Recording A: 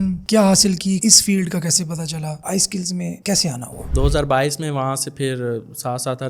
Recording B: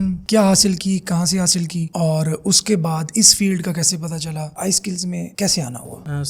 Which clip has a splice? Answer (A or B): A